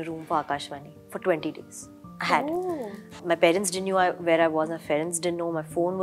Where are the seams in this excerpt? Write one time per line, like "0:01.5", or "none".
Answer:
none